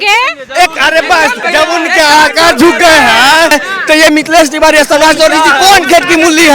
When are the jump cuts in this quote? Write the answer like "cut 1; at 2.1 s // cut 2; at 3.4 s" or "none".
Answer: cut 1; at 1.4 s // cut 2; at 3.5 s